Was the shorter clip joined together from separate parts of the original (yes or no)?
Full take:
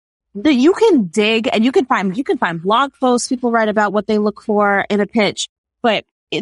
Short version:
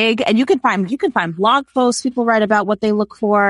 no